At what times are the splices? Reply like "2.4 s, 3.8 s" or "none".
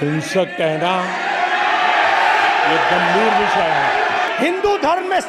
4.3 s